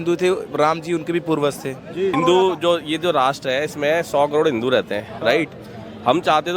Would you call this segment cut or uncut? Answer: cut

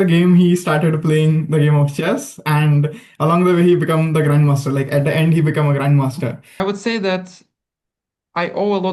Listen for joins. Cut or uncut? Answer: cut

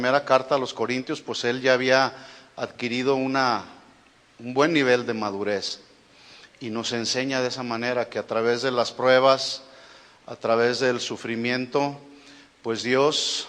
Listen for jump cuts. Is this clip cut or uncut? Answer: cut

